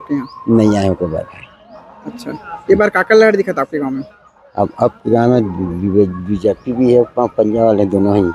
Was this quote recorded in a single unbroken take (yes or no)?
yes